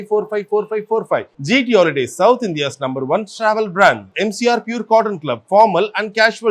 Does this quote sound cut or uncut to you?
uncut